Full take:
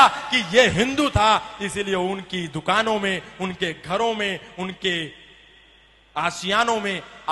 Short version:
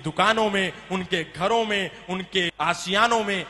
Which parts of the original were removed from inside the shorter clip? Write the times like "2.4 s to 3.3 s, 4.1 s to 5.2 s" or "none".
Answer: 5.0 s to 6.1 s